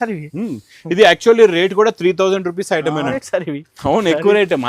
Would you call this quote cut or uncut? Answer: cut